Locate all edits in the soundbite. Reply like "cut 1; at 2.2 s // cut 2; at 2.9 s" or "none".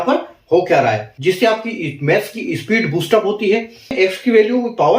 cut 1; at 1.1 s // cut 2; at 3.9 s